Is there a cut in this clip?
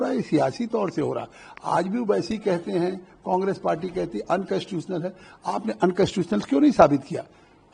no; 0 cuts

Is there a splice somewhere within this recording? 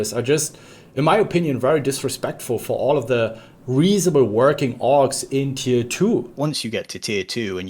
yes; 1 cut; at 6.4 s

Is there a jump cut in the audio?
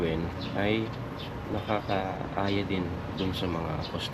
no; 0 cuts

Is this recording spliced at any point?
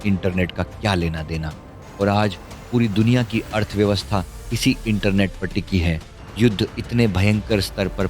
yes; 2 cuts; at 1.8 s, 6.2 s

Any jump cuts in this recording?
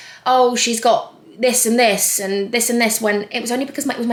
no; 0 cuts

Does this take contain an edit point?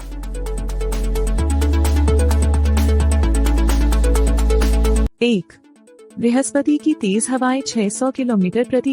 yes; 1 cut; at 5.0 s

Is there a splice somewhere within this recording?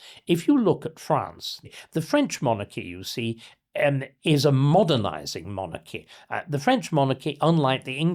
yes; 1 cut; at 1.6 s

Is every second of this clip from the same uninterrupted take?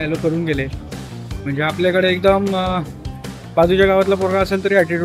yes; 0 cuts

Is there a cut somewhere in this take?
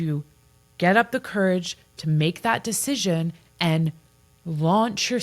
no; 0 cuts

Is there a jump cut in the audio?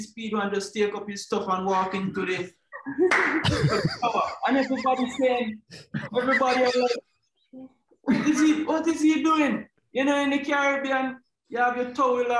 no; 0 cuts

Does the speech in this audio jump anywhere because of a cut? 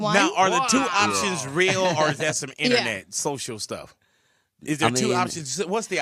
no; 0 cuts

